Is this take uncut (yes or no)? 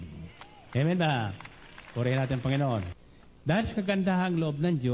no